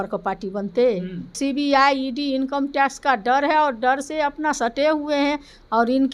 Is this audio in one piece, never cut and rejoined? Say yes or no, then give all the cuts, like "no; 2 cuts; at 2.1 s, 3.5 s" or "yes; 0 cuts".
no; 1 cut; at 1.3 s